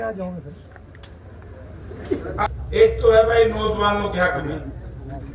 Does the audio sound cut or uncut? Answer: cut